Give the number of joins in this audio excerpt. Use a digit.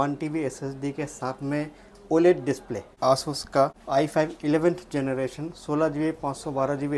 2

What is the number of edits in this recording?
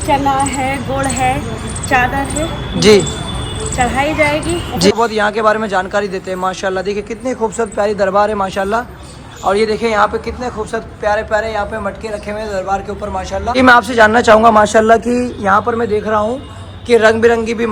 2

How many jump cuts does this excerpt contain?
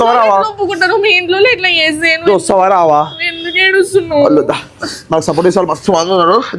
0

